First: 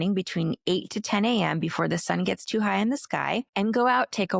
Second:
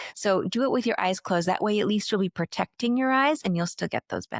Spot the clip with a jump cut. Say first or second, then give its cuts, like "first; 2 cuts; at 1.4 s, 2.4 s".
first; 1 cut; at 3.5 s